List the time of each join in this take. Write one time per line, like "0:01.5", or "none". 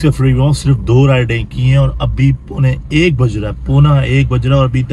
none